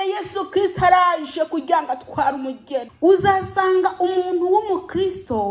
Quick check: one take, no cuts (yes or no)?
no